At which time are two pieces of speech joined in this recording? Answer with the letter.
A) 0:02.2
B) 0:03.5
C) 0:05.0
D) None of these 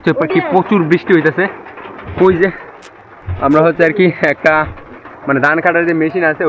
D